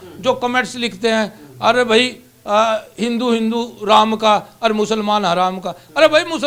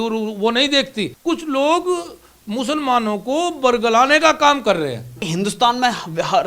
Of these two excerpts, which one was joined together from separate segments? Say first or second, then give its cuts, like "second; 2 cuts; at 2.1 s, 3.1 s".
second; 2 cuts; at 1.1 s, 5.2 s